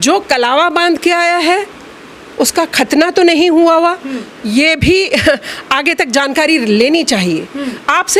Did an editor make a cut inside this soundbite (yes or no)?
no